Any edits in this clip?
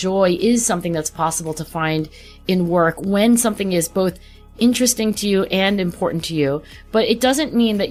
no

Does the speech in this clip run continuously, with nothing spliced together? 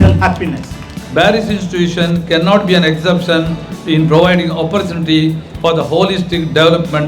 no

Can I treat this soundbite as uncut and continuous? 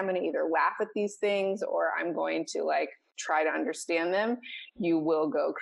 yes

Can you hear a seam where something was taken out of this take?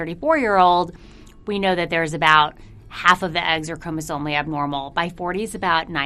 no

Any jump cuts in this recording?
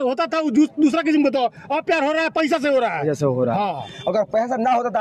no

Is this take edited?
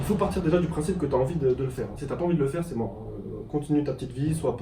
no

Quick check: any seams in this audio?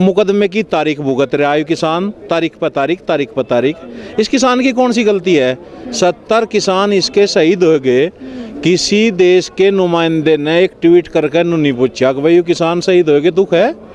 no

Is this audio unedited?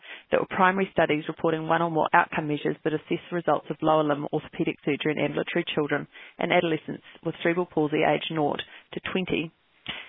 yes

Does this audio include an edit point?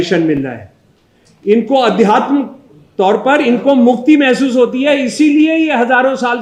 no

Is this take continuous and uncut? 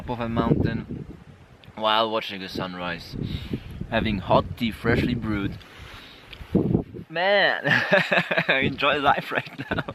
yes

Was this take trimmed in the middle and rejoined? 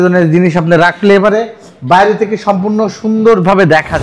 no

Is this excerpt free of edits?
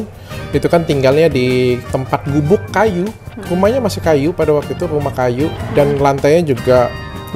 no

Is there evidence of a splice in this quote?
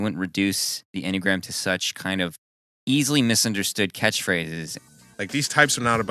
yes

